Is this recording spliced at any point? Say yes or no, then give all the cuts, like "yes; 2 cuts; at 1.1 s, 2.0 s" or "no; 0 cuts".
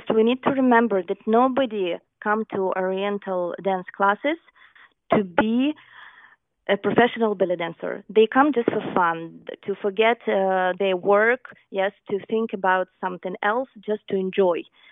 no; 0 cuts